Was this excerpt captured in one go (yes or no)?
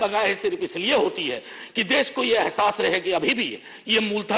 yes